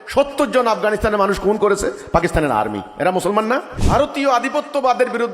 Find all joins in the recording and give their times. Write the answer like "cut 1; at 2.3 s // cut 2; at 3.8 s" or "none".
cut 1; at 3.8 s